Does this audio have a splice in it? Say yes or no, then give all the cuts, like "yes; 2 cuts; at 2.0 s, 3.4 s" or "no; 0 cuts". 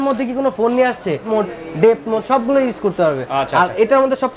yes; 1 cut; at 1.2 s